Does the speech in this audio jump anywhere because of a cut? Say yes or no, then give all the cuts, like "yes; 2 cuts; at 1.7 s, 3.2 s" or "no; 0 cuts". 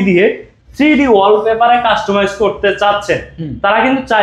no; 0 cuts